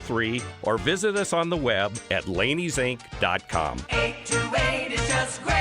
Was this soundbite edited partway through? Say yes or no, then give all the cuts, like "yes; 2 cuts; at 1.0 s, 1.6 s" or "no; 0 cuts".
yes; 1 cut; at 3.8 s